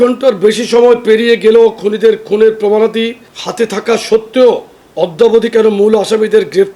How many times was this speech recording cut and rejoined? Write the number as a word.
zero